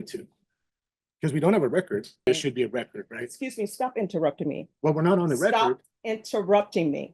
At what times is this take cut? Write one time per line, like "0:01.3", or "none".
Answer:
0:02.3